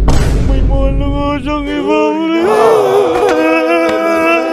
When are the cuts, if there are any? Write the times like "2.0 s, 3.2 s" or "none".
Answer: none